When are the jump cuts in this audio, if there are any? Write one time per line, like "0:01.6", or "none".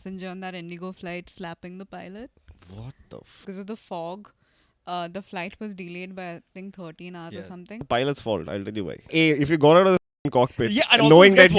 0:03.4
0:07.8
0:09.1

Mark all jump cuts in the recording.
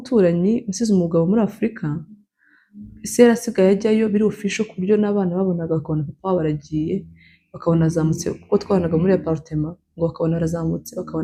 none

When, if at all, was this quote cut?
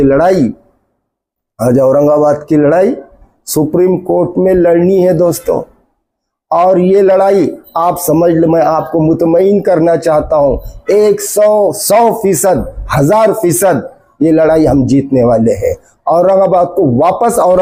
none

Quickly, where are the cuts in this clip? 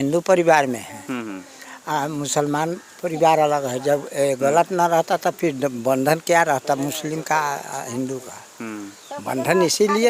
none

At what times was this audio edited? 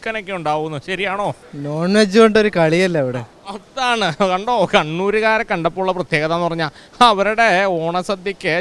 0:01.5

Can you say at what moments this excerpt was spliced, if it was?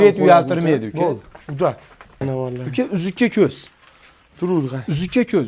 0:02.2

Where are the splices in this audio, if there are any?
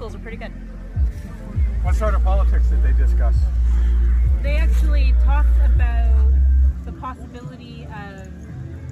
0:03.5

